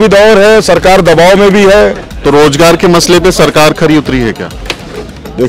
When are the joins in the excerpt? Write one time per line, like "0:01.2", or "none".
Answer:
0:02.1